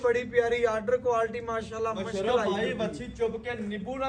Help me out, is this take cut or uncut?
uncut